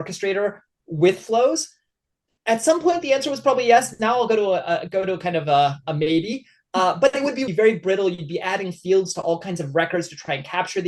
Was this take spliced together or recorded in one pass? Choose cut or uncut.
cut